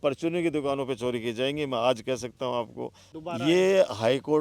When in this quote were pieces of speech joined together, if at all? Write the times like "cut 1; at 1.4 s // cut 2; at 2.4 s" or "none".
cut 1; at 3.0 s